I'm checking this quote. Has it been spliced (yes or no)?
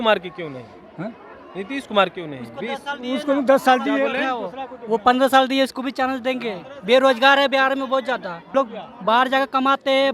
yes